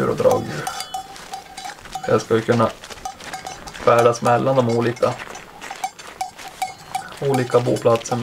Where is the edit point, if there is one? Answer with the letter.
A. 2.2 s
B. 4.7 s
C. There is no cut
A